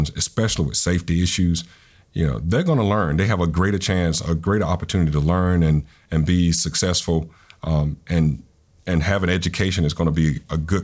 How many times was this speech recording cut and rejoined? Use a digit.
0